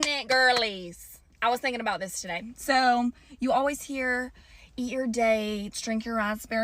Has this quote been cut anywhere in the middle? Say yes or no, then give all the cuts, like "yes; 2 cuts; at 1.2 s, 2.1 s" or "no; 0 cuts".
no; 0 cuts